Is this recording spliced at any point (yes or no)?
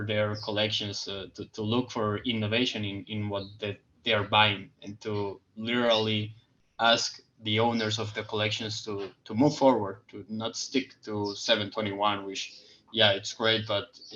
no